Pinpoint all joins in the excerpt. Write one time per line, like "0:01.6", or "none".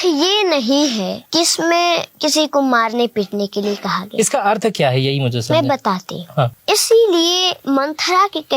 0:01.2
0:02.1
0:06.6
0:07.5